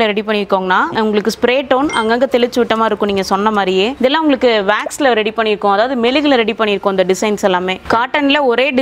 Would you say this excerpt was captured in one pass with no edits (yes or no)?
no